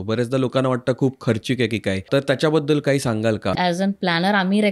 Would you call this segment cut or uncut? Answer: cut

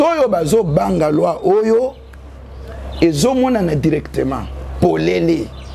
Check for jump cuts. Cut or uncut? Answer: uncut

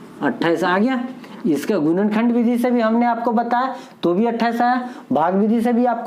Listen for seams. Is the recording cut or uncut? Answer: uncut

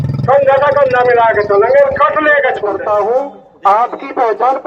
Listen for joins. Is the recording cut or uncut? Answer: cut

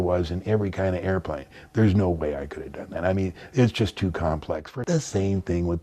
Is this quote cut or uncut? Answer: cut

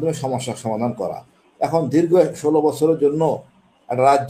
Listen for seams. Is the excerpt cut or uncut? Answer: uncut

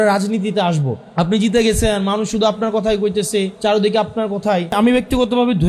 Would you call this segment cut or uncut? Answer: cut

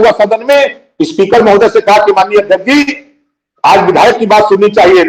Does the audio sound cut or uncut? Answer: uncut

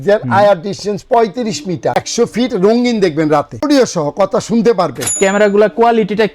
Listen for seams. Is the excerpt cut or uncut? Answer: cut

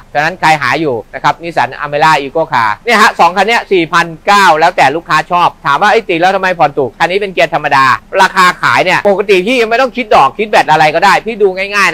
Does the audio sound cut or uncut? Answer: cut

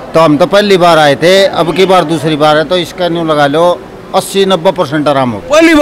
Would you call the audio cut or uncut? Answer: uncut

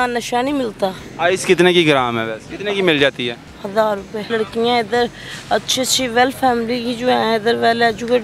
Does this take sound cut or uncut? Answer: cut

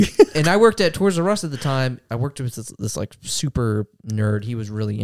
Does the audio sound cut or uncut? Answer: cut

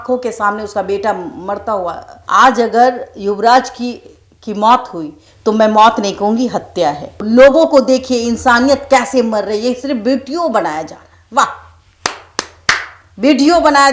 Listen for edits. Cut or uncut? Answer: cut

